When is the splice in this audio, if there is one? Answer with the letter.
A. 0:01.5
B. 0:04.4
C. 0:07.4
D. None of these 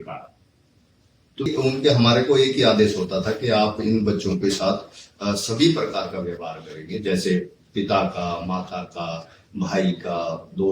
A